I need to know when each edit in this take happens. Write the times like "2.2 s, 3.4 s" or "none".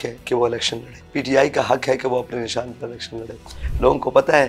1.0 s, 3.6 s